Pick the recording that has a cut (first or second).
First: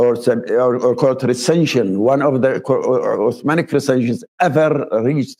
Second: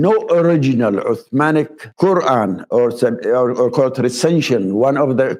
second